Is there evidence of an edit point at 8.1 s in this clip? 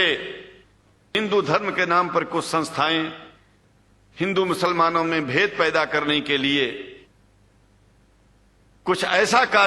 no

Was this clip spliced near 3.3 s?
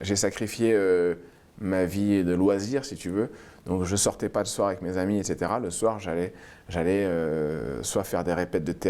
no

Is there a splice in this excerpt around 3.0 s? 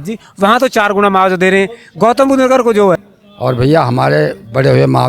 yes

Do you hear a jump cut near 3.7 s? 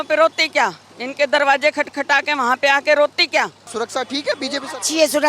yes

